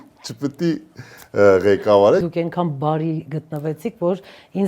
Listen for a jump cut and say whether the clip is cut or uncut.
cut